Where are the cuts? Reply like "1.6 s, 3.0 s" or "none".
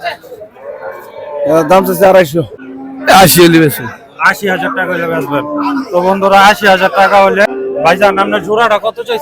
2.6 s, 7.4 s

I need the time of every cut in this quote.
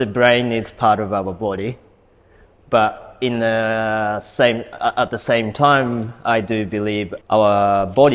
7.1 s

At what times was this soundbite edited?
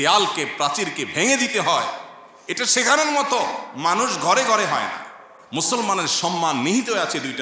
5.4 s

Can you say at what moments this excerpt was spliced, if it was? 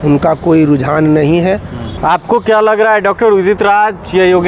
1.8 s

